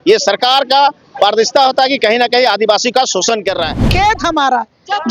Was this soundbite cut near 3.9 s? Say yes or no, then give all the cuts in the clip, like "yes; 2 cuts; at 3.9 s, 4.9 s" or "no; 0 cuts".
yes; 1 cut; at 3.9 s